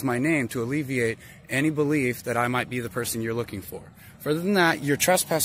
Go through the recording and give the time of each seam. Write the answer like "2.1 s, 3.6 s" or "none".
none